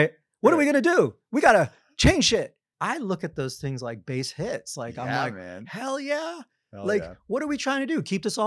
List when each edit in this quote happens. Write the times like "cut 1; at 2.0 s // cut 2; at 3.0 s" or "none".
cut 1; at 2.6 s